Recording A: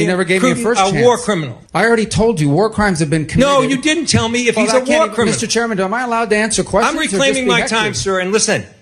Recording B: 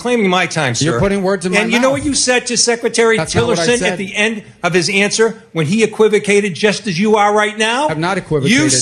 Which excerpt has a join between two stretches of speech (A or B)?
A